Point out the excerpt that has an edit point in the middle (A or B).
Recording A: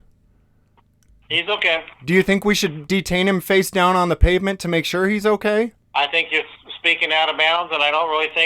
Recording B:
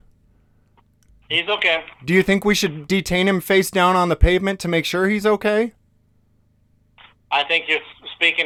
A